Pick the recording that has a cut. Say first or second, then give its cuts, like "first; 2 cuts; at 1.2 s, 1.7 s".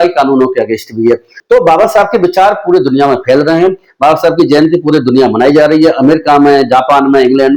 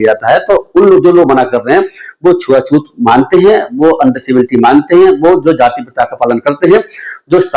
first; 1 cut; at 1.3 s